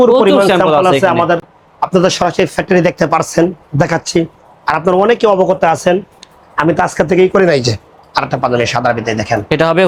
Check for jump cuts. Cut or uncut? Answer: uncut